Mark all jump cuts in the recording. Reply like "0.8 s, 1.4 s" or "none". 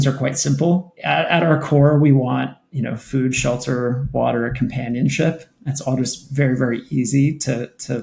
0.9 s